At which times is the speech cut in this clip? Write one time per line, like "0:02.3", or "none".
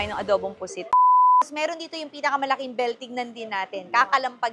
0:00.9
0:01.5